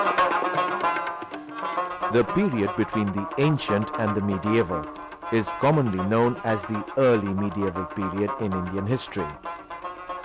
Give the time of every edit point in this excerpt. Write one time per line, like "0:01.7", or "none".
0:03.1